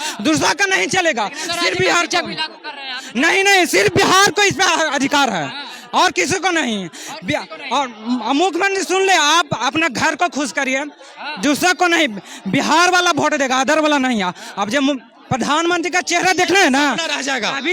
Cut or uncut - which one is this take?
uncut